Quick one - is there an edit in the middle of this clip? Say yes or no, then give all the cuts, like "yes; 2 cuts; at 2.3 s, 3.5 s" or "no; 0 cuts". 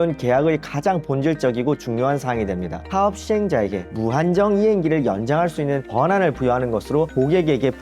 yes; 1 cut; at 2.8 s